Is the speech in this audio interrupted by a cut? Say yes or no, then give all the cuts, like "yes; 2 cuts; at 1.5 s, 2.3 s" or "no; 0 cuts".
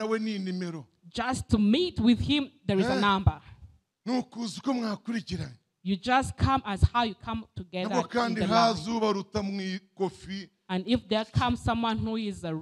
no; 0 cuts